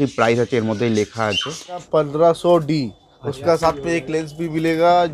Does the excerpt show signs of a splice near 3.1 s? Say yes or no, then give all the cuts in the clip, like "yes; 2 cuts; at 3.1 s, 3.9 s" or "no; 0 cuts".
no; 1 cut; at 1.9 s